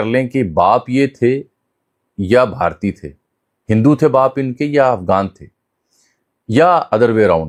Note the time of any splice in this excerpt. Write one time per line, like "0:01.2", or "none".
none